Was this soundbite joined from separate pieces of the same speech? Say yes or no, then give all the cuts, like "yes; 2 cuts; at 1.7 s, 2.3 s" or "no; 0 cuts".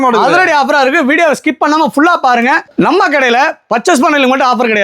yes; 1 cut; at 2.7 s